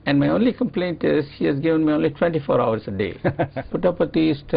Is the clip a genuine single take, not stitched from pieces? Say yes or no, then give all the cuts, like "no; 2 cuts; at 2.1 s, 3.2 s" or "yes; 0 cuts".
no; 1 cut; at 3.5 s